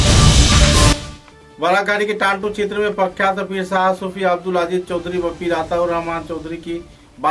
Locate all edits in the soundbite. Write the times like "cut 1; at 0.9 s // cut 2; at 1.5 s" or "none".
cut 1; at 0.9 s